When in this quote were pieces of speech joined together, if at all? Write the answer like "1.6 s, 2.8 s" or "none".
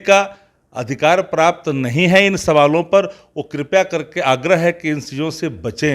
none